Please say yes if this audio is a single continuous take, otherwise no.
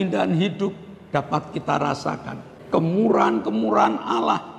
no